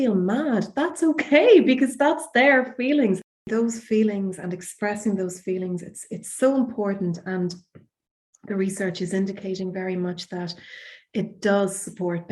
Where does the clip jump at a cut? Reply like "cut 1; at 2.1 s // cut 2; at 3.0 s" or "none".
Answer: cut 1; at 3.5 s